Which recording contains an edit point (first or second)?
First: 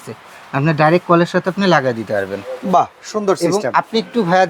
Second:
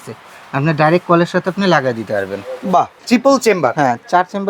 second